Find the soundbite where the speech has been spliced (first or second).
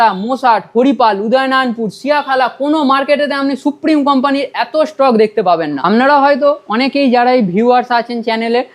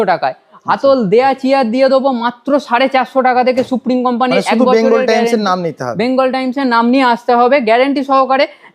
first